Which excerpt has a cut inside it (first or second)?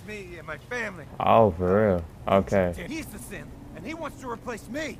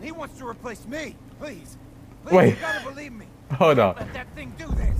first